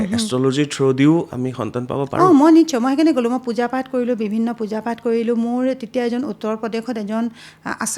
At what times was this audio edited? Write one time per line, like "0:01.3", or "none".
none

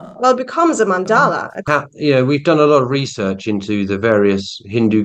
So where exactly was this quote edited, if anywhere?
0:01.5

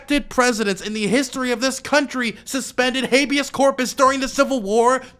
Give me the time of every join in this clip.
none

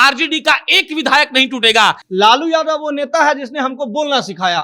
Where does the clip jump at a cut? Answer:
0:02.0

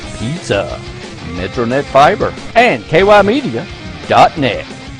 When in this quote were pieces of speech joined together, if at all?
0:02.4

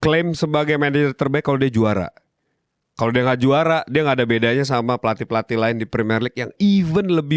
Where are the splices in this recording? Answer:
none

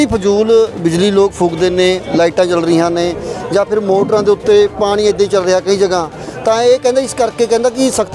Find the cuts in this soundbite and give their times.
none

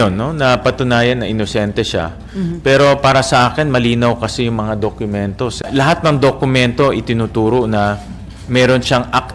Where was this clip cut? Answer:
0:05.6

